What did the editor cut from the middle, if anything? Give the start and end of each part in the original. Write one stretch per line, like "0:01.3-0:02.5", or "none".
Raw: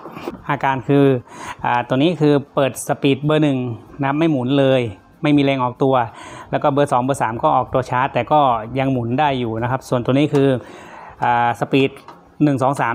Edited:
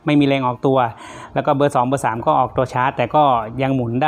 none